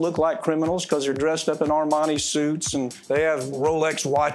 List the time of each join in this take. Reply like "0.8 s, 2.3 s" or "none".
3.4 s